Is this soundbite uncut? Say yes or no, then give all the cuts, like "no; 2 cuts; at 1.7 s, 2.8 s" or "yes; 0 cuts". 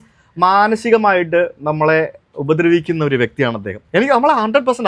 yes; 0 cuts